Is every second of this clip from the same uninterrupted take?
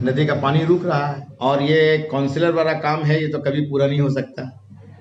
no; 1 cut; at 1.2 s

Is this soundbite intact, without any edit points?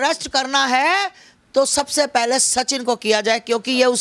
yes; 0 cuts

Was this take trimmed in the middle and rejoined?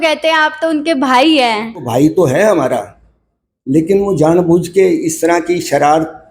yes; 1 cut; at 1.9 s

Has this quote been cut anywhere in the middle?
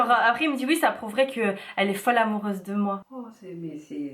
no; 0 cuts

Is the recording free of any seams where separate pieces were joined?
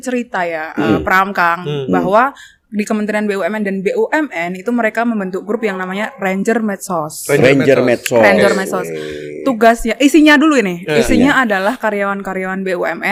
yes; 0 cuts

